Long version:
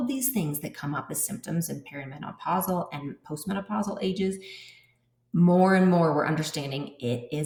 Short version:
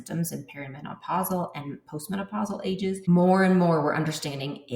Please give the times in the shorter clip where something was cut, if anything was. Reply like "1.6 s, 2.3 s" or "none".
3.1 s